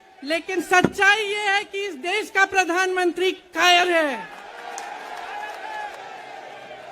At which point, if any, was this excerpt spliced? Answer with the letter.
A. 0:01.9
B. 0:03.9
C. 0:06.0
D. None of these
C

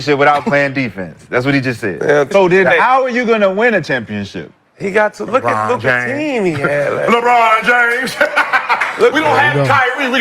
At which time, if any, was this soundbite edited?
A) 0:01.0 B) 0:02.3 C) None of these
B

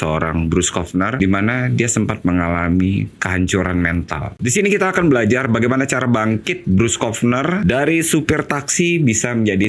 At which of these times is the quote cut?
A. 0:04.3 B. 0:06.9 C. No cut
A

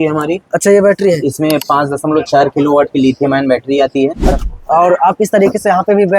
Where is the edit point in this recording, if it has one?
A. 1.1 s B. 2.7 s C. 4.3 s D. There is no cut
C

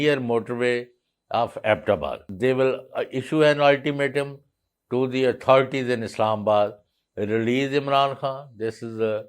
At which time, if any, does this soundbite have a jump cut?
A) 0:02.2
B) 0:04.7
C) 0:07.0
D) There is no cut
A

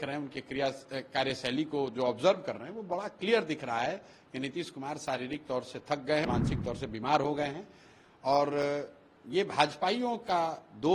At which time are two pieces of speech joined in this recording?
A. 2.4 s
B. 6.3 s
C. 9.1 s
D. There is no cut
B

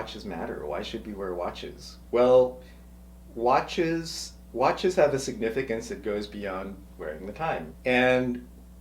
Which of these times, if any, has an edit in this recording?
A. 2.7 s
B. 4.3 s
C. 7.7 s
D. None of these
C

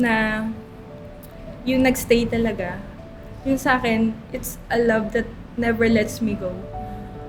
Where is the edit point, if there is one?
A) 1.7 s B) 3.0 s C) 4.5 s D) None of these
D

